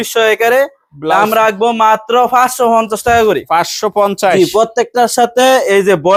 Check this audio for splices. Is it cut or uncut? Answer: uncut